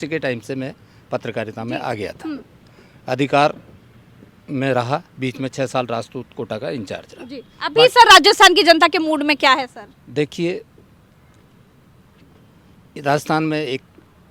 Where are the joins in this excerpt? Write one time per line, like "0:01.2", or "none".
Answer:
none